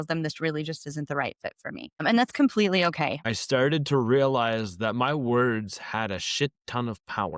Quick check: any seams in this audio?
yes; 2 cuts; at 2.0 s, 3.2 s

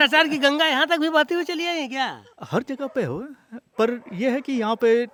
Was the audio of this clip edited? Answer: no; 0 cuts

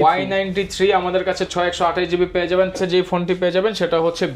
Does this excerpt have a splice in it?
yes; 1 cut; at 2.8 s

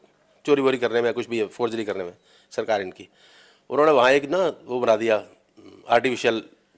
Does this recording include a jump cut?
no; 0 cuts

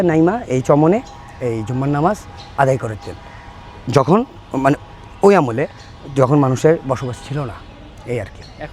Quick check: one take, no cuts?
yes; 0 cuts

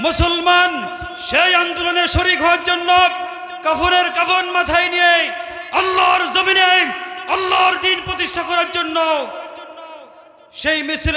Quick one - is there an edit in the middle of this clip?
no; 0 cuts

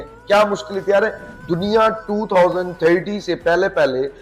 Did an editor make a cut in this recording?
yes; 1 cut; at 1.3 s

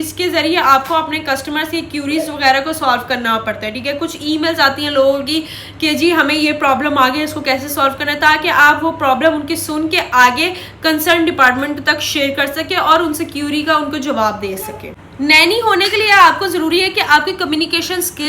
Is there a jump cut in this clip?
yes; 1 cut; at 15.0 s

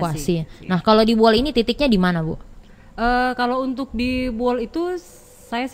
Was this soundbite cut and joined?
no; 0 cuts

